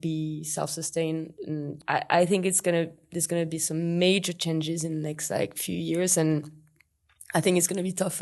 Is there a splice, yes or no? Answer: yes